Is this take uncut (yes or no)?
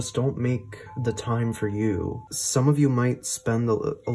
no